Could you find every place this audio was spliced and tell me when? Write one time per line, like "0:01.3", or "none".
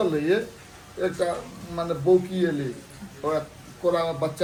none